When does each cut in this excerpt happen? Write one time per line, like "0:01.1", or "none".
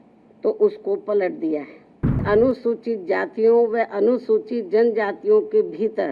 0:02.2